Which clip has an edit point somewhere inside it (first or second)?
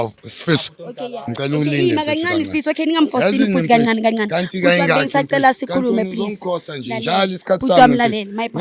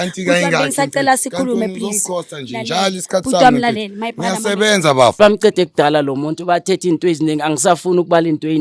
second